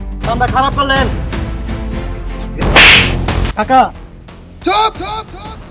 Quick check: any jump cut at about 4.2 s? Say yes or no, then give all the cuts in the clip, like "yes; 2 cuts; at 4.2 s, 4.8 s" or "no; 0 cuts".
no; 1 cut; at 2.6 s